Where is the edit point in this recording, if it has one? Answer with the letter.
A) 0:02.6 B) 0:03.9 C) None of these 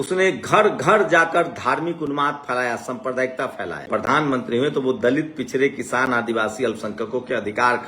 B